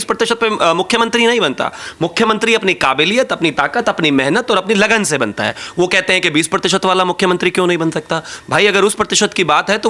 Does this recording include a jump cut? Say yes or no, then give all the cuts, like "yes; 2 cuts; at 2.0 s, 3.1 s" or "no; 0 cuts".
no; 0 cuts